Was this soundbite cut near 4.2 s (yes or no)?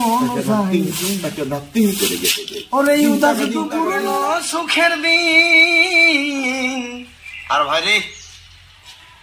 yes